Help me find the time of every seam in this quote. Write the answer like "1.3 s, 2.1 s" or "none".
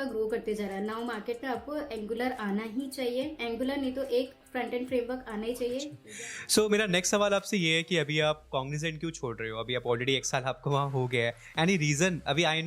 6.0 s